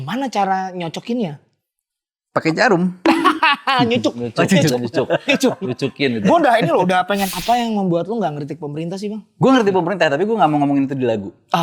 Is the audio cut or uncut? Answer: cut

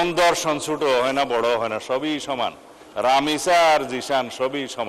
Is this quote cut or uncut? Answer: uncut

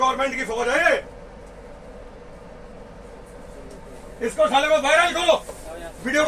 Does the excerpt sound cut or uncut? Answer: uncut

